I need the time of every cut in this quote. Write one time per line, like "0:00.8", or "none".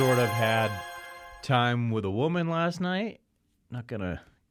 none